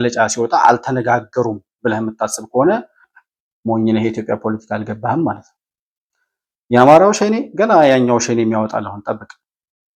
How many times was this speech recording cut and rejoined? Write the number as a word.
zero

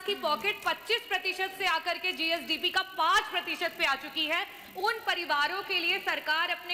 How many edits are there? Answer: zero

